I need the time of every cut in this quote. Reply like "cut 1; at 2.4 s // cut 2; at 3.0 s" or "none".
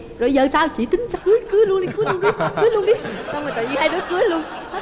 cut 1; at 1.2 s